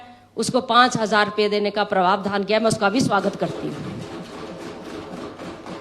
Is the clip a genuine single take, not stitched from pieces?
yes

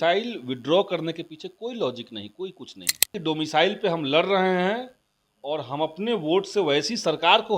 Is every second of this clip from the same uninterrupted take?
no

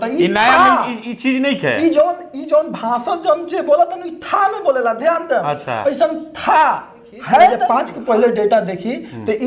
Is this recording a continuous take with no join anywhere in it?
no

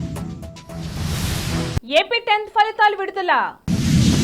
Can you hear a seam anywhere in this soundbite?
no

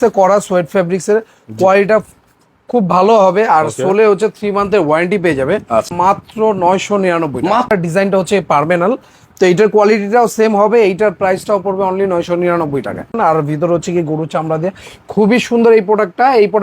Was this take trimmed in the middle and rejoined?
yes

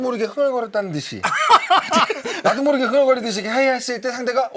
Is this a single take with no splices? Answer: no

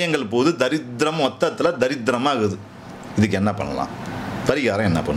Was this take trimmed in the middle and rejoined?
no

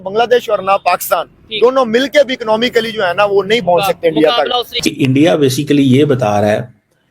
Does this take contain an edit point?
yes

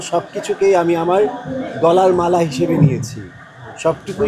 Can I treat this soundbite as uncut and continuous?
yes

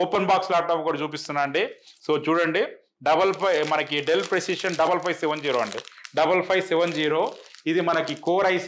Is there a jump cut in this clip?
no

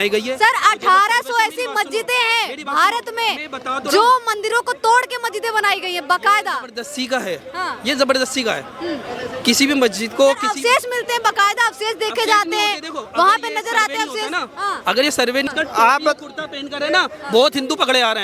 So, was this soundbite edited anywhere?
yes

